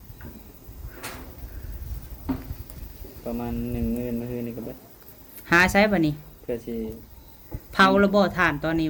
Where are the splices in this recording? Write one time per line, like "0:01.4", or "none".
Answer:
none

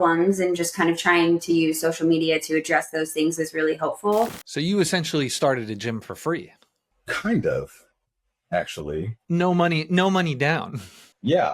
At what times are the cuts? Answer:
0:04.4

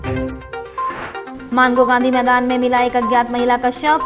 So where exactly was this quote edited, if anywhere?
0:01.2

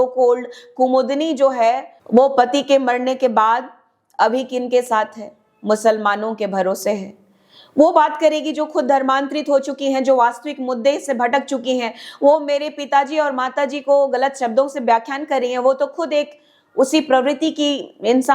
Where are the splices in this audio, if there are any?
0:01.9

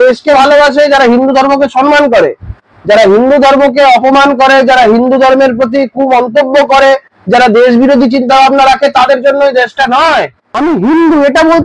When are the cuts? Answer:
0:10.4

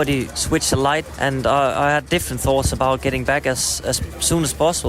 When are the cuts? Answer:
0:01.1

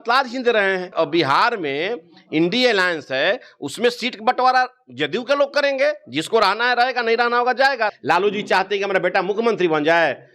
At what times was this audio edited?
0:00.9
0:08.0

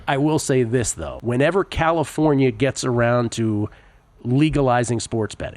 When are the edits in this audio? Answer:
0:01.1

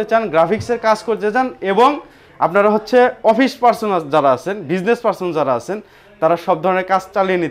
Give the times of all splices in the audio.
none

